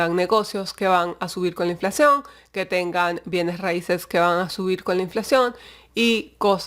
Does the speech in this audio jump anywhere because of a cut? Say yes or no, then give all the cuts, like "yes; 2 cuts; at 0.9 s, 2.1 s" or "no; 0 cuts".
no; 0 cuts